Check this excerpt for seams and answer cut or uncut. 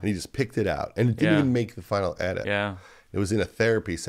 uncut